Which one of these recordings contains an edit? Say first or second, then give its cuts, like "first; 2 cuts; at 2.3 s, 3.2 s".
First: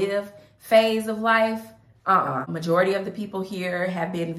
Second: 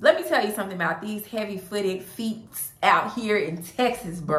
first; 1 cut; at 2.5 s